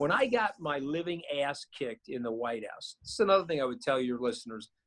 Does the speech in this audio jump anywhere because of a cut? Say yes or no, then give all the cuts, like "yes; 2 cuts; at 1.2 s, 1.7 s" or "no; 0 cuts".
no; 0 cuts